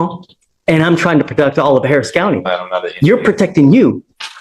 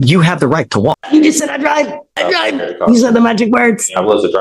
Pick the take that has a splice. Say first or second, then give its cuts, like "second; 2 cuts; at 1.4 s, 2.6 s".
second; 1 cut; at 1.0 s